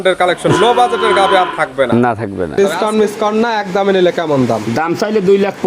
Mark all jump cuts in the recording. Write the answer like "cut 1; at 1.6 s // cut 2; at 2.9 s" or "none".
cut 1; at 2.5 s